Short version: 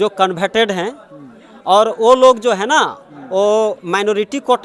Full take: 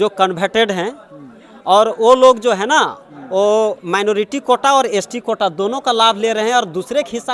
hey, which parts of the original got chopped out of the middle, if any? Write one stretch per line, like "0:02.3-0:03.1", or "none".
none